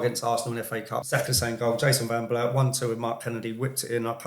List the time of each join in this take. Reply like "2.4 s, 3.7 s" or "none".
1.1 s